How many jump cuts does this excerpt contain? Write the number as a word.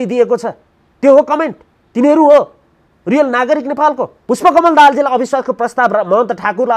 one